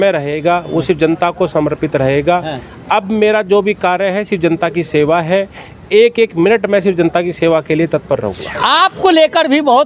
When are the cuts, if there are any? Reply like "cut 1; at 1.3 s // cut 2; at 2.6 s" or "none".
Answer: cut 1; at 8.5 s